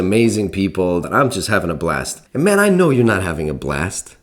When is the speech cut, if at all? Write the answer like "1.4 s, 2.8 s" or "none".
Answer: 1.1 s, 2.2 s